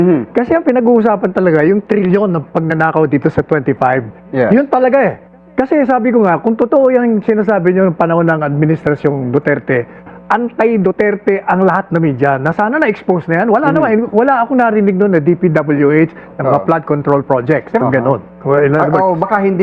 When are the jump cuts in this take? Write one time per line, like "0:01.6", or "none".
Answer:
0:17.8